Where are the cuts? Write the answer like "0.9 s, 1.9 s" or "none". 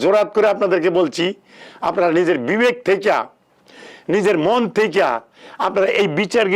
none